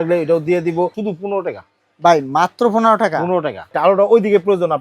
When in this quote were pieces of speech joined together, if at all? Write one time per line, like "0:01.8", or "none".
0:01.0
0:03.7